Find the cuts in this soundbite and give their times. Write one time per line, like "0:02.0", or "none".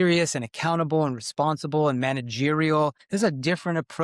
0:03.0